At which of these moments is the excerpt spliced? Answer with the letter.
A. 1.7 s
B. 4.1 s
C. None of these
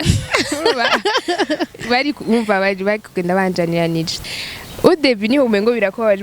B